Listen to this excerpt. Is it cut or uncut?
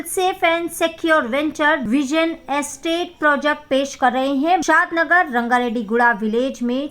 cut